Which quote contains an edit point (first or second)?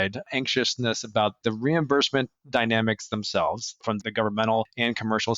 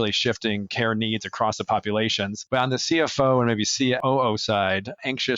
first